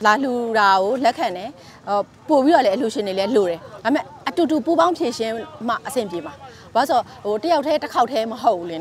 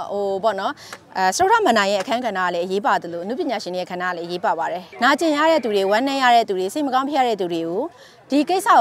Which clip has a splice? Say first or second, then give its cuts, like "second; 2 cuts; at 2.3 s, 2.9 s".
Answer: second; 1 cut; at 4.8 s